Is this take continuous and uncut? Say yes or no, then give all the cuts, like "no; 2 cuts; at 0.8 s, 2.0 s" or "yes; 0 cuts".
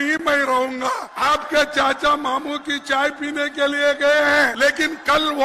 no; 2 cuts; at 1.1 s, 4.5 s